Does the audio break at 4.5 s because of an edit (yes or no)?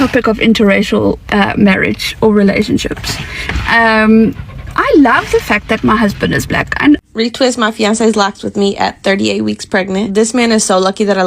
no